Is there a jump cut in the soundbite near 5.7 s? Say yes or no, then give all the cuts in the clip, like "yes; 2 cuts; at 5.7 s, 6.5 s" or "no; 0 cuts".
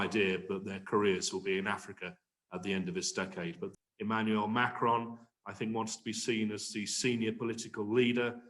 no; 1 cut; at 3.7 s